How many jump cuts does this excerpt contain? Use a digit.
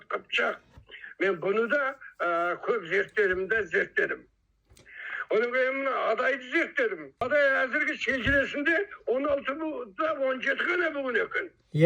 0